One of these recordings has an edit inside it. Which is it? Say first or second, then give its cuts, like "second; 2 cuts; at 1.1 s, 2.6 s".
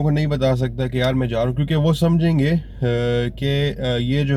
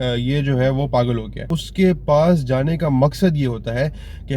second; 1 cut; at 1.5 s